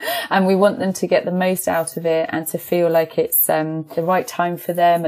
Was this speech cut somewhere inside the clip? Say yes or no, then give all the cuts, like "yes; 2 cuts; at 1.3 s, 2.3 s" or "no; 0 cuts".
yes; 1 cut; at 4.0 s